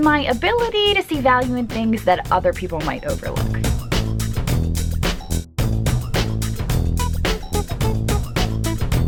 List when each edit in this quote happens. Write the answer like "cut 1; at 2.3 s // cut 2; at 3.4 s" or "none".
none